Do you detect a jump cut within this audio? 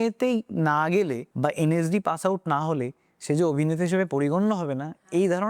yes; 1 cut; at 1.2 s

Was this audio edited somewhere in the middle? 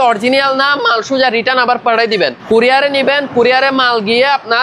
yes; 1 cut; at 2.4 s

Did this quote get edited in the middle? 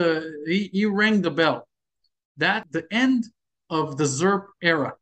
yes; 1 cut; at 2.7 s

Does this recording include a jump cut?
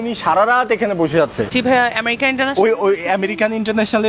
yes; 1 cut; at 1.5 s

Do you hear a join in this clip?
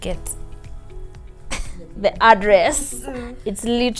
no; 0 cuts

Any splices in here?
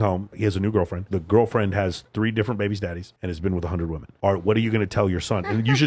yes; 1 cut; at 1.0 s

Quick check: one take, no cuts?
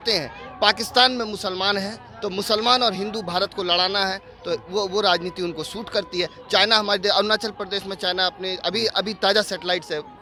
yes; 0 cuts

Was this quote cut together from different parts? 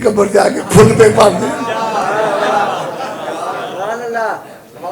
no; 0 cuts

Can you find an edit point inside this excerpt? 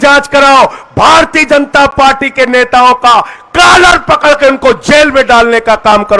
no; 0 cuts

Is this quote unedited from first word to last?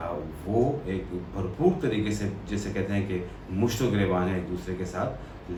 yes; 0 cuts

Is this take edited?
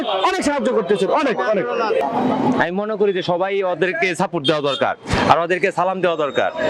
no; 0 cuts

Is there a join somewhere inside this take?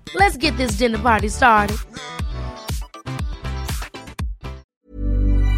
yes; 1 cut; at 4.6 s

